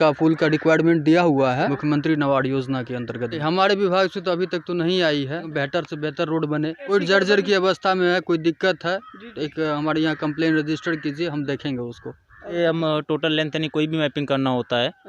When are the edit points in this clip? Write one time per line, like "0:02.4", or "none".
0:01.7
0:03.4
0:05.5
0:06.9
0:12.5

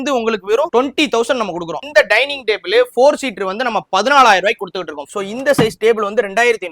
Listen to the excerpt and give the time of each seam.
0:01.8
0:05.0

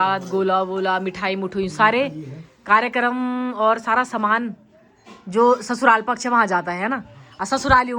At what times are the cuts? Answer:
none

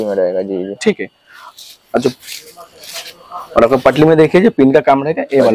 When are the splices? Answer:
none

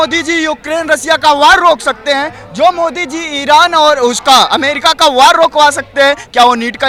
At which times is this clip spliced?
none

